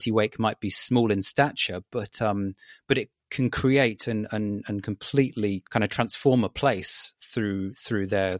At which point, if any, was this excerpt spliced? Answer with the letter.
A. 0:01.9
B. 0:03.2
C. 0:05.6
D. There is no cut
C